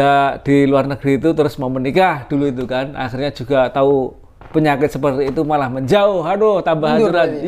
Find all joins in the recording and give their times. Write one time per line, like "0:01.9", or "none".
none